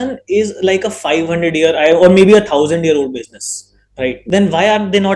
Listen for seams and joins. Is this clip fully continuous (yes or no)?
no